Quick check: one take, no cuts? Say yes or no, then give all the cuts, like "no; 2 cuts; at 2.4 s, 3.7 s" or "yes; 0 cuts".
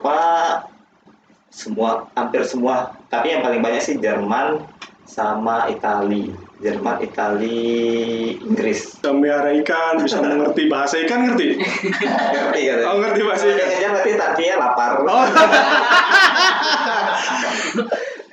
no; 1 cut; at 9.0 s